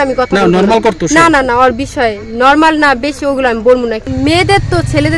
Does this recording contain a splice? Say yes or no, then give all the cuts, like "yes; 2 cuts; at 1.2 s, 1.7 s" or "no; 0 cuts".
yes; 1 cut; at 4.0 s